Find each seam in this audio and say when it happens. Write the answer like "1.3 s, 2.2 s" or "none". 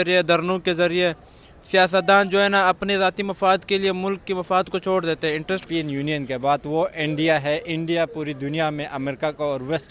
5.7 s